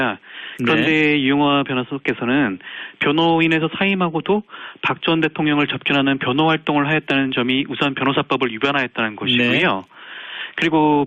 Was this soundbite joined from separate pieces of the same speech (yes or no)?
yes